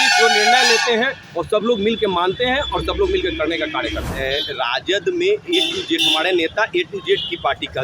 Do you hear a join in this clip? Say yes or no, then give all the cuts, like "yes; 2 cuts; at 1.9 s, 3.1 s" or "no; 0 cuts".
yes; 1 cut; at 4.1 s